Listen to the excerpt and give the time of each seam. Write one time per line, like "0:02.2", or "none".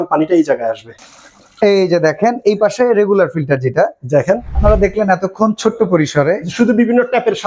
0:00.9
0:04.6